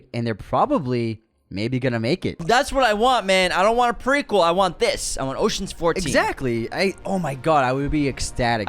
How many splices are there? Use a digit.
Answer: 1